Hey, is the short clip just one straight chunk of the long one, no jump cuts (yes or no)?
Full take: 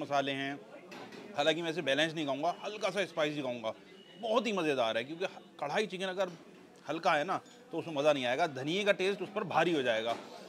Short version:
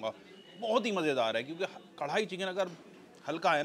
yes